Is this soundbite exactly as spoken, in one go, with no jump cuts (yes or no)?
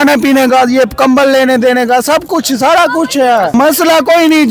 no